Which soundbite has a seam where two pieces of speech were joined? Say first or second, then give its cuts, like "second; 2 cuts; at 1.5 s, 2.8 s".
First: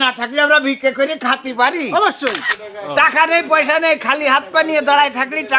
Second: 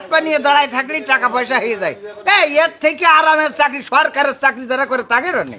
first; 1 cut; at 2.5 s